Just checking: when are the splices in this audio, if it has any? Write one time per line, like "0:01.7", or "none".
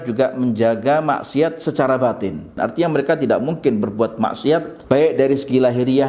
0:02.5
0:04.7